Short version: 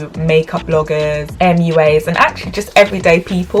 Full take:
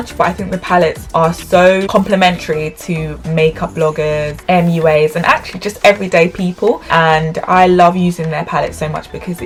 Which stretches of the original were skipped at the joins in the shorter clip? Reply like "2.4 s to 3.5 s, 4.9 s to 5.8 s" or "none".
none